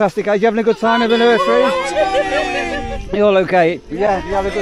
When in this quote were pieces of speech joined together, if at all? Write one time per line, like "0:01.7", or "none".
none